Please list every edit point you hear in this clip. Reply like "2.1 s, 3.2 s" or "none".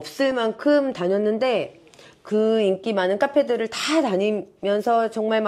none